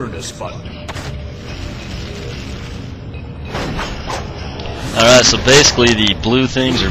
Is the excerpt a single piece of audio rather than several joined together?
yes; 0 cuts

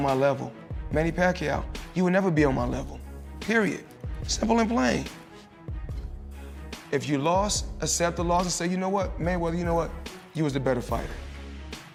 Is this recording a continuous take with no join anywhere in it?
yes; 0 cuts

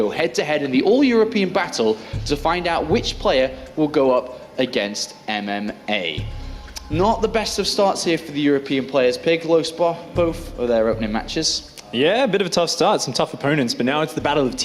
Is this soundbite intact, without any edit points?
yes; 0 cuts

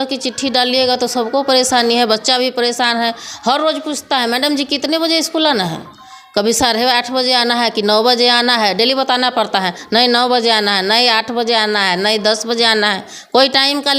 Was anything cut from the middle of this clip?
no; 0 cuts

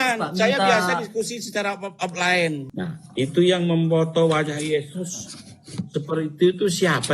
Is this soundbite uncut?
no; 1 cut; at 2.7 s

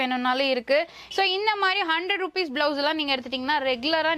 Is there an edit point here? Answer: yes; 1 cut; at 1.0 s

